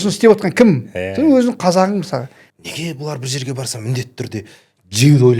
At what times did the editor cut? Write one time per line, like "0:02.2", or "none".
0:02.4